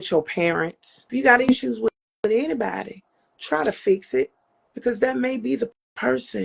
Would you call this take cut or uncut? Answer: cut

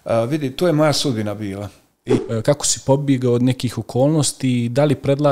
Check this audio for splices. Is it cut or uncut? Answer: cut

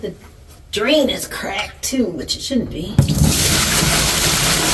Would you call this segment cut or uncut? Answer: uncut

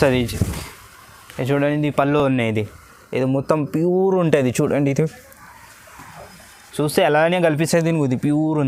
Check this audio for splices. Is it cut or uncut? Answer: uncut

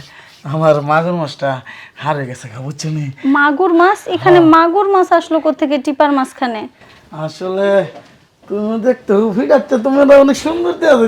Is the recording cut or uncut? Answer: cut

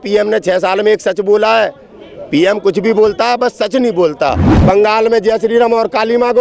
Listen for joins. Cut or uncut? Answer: cut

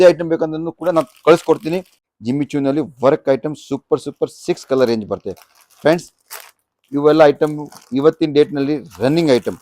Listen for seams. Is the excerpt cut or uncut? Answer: cut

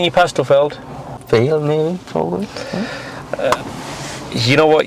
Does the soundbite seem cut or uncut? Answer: cut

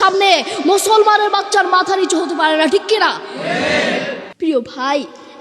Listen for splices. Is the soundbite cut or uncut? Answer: cut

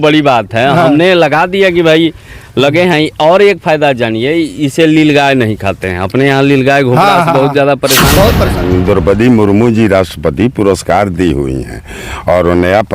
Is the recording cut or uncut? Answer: cut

